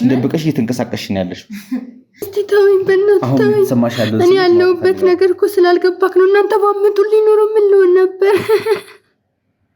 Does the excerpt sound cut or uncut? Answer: cut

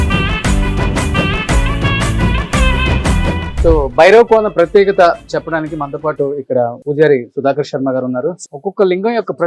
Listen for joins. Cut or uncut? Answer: cut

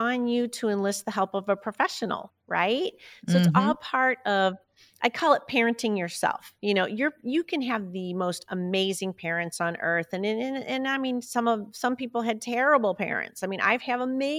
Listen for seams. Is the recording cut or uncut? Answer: cut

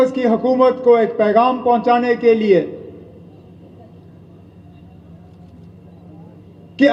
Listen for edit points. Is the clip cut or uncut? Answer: uncut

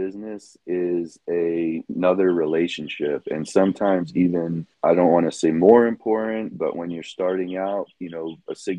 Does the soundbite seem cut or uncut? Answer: cut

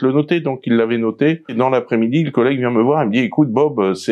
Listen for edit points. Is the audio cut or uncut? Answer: cut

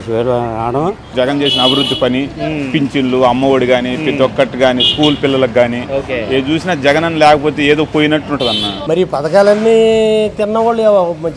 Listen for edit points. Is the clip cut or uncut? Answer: cut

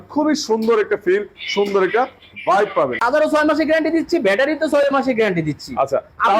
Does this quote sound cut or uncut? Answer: cut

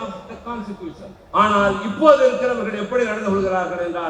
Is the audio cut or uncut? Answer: cut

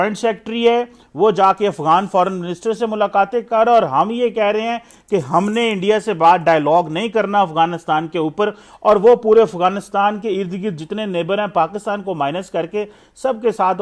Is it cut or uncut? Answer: uncut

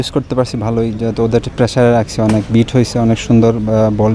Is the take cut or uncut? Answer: uncut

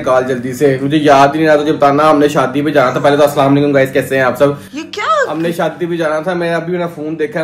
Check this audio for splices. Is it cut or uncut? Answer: uncut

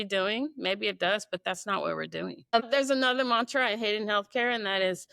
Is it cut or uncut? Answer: cut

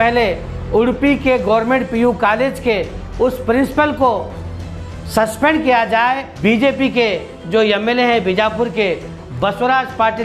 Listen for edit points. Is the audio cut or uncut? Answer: cut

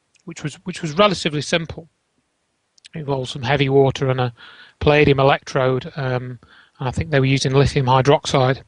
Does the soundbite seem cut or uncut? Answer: cut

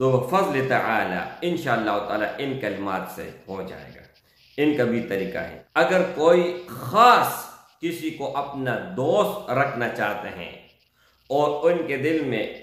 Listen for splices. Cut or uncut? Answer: cut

